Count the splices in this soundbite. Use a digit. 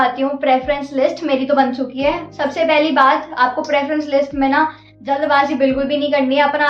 0